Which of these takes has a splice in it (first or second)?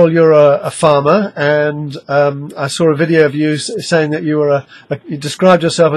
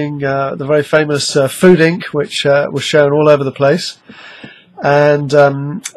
first